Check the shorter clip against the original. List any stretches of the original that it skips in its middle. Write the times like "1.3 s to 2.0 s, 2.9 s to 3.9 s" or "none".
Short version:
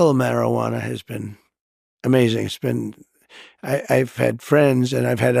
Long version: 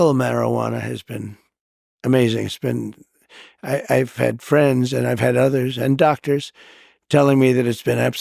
none